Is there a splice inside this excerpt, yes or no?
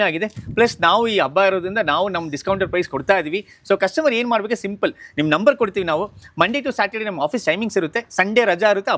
no